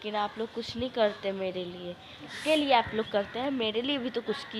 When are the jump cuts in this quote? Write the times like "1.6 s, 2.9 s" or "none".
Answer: 2.3 s